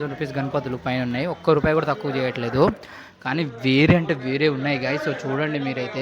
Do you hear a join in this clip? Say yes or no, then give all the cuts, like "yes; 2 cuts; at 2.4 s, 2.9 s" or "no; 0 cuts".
no; 0 cuts